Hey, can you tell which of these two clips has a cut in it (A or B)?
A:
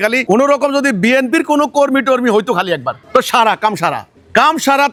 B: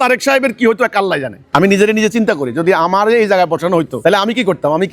B